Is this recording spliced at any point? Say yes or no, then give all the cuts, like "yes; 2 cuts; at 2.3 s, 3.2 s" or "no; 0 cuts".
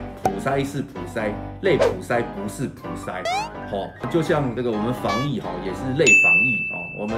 no; 0 cuts